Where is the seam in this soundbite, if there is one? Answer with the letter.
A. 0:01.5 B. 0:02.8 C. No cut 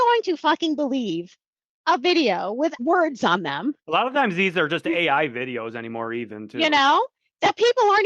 B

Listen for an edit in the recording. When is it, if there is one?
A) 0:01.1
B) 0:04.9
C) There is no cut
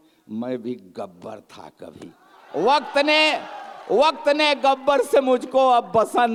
C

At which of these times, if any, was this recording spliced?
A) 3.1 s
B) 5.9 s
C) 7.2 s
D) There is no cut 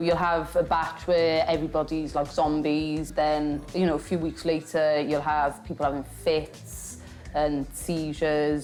D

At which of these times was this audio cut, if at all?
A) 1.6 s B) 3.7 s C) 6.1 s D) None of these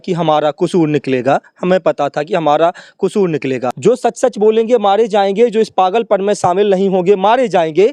B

